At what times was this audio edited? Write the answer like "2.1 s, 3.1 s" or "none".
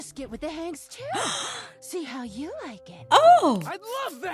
none